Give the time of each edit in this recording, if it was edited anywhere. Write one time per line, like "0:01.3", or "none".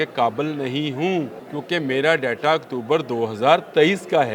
0:01.4